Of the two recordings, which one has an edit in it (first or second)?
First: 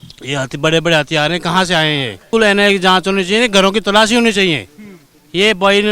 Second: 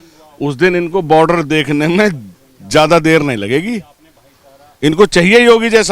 first